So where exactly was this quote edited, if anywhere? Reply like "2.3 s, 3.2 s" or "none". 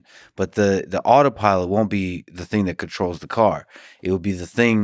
none